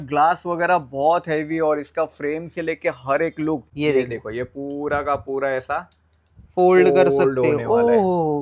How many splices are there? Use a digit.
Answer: 1